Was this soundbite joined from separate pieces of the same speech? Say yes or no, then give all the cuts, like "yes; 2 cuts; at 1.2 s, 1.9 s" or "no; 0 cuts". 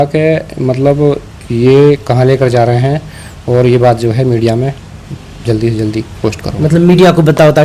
no; 0 cuts